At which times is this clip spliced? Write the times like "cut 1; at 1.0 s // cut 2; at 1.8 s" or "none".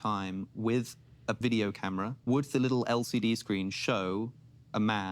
cut 1; at 1.4 s // cut 2; at 2.2 s

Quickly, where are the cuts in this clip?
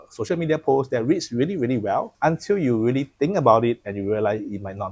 cut 1; at 2.1 s

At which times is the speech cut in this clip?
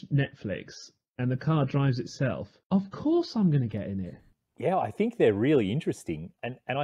cut 1; at 4.2 s

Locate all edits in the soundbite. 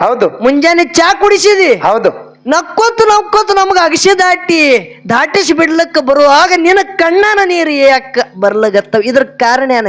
none

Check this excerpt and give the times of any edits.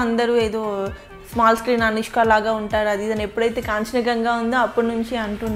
none

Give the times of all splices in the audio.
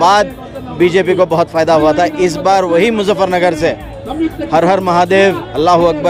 none

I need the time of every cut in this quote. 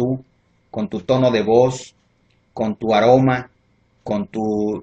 cut 1; at 1.1 s

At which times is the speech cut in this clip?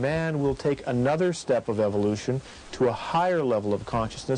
none

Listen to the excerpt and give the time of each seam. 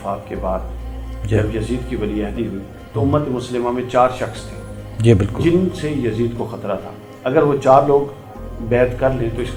none

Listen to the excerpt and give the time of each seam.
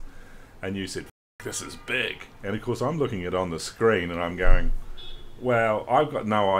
cut 1; at 2.3 s

